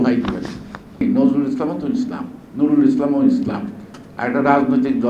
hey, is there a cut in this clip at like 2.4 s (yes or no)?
no